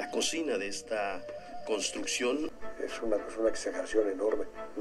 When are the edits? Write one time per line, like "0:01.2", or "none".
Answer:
0:02.5